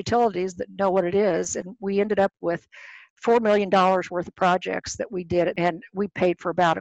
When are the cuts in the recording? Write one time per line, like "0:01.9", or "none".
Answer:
0:03.1
0:05.5